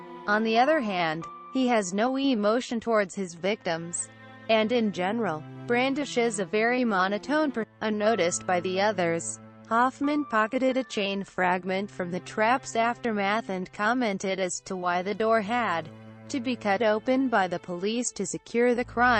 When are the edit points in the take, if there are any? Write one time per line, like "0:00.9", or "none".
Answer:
none